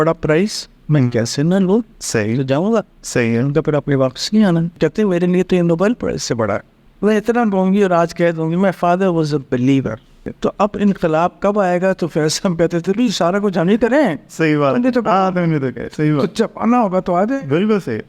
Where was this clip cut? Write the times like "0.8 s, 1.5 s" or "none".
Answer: 4.7 s, 6.7 s, 10.3 s